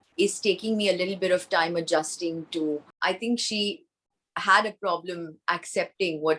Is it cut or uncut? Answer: cut